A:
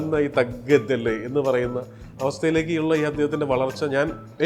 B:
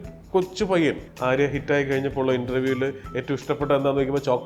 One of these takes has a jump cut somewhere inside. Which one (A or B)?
B